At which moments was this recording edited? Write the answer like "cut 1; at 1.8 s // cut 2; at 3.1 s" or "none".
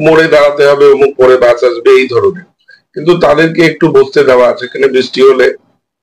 none